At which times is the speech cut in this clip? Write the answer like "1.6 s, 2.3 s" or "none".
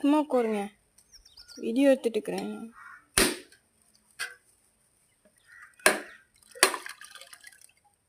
none